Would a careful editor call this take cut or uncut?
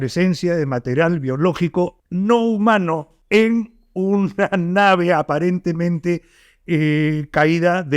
cut